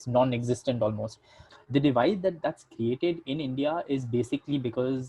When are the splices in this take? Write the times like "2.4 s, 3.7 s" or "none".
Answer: 1.4 s